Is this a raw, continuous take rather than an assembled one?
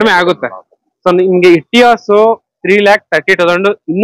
yes; 0 cuts

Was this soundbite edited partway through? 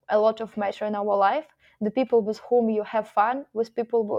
no; 0 cuts

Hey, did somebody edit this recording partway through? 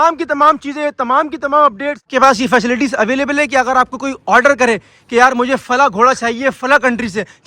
yes; 1 cut; at 2.1 s

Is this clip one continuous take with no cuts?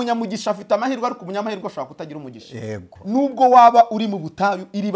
no; 1 cut; at 2.9 s

